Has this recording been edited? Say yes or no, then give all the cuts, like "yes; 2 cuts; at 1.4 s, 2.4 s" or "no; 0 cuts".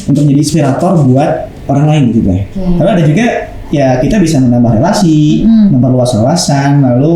yes; 1 cut; at 2.5 s